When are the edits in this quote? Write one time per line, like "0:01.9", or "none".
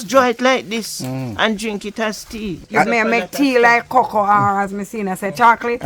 0:02.6

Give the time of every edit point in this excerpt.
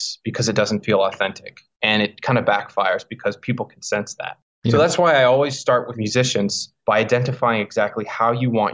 0:06.3

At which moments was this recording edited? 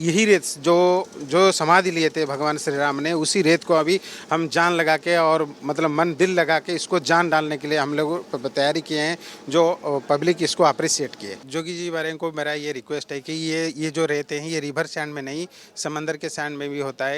0:11.5

